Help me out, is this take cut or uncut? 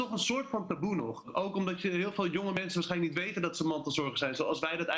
cut